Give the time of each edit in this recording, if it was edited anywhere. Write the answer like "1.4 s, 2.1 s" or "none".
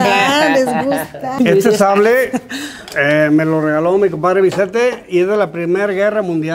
1.2 s